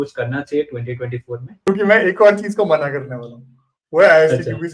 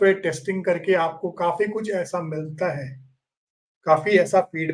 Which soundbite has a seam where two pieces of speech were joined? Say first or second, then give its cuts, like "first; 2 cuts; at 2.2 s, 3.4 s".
first; 1 cut; at 1.5 s